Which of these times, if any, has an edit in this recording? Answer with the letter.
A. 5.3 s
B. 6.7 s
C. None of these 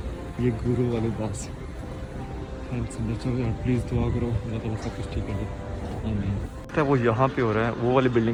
C